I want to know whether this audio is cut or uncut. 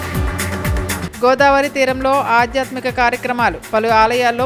uncut